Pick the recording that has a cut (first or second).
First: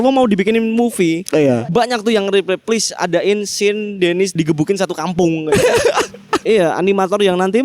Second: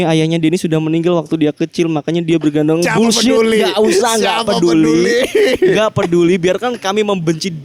first